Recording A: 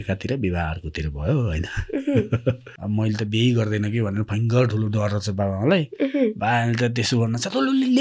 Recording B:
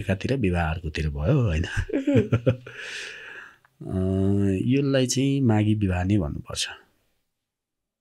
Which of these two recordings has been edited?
A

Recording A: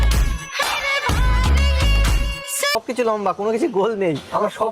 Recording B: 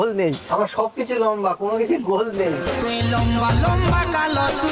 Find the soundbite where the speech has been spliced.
A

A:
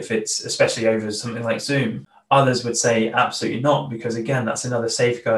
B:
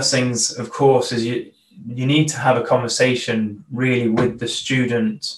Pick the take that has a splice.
A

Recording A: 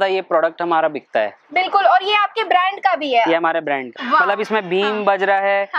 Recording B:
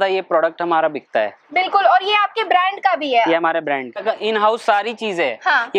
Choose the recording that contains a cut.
A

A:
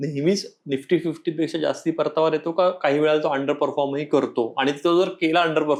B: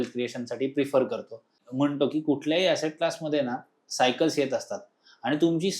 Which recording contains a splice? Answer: B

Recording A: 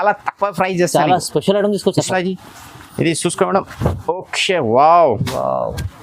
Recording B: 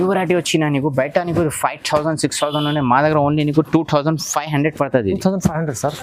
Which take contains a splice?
A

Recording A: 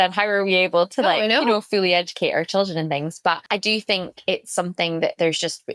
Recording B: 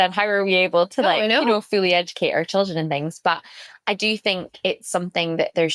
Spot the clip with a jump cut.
A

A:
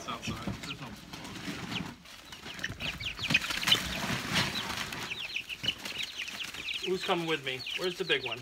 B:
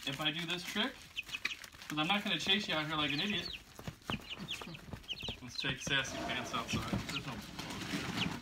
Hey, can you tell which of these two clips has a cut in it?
B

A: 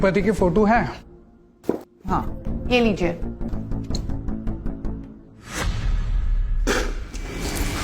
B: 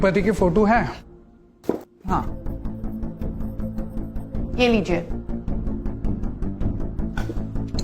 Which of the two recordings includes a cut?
A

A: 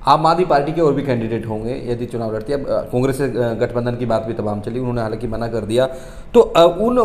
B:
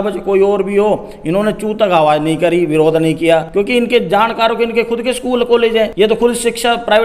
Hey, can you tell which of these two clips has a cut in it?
B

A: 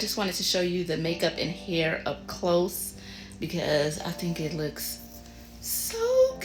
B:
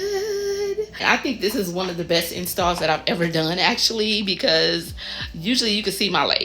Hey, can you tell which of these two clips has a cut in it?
B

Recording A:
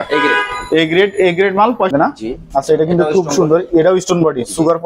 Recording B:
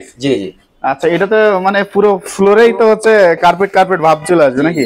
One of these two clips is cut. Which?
A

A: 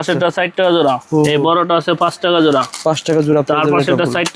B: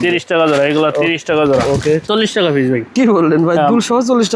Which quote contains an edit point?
B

